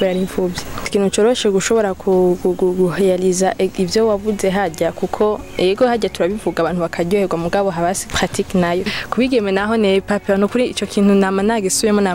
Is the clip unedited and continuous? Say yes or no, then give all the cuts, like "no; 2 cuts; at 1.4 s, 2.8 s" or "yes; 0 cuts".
no; 3 cuts; at 0.8 s, 8.0 s, 9.0 s